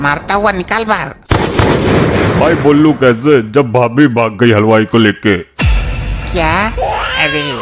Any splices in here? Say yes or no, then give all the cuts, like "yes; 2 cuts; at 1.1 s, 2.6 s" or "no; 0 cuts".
yes; 1 cut; at 1.1 s